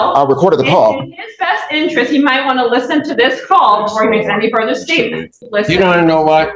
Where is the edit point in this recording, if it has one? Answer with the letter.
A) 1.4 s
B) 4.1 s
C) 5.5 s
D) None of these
C